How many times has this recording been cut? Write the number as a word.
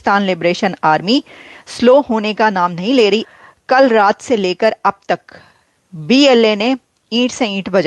one